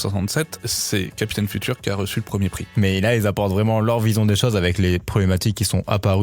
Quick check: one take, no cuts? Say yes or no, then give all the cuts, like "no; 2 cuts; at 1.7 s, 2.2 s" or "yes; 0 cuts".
no; 1 cut; at 2.6 s